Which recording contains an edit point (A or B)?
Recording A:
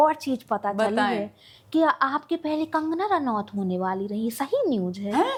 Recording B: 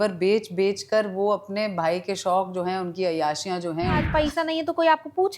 B